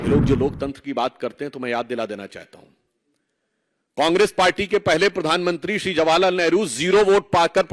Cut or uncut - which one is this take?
uncut